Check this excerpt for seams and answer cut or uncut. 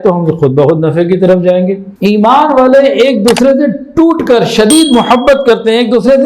cut